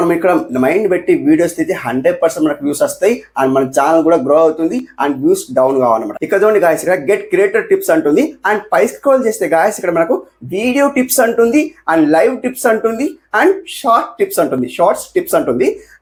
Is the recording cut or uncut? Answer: uncut